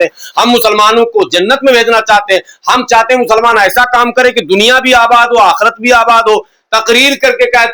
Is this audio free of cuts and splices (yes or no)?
yes